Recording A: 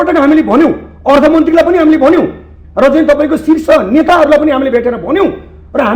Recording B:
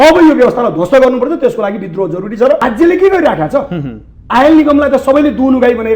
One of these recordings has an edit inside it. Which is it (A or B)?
B